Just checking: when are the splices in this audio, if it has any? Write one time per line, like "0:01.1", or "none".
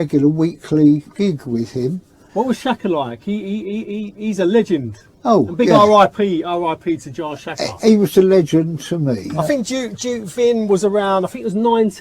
0:02.2
0:09.3